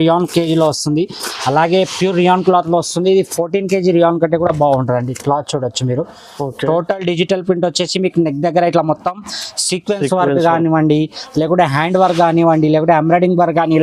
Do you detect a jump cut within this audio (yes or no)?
no